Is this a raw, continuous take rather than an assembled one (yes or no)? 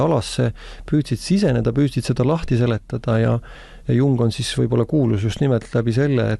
yes